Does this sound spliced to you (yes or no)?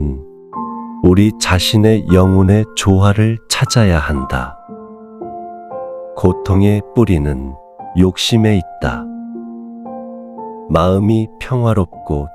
no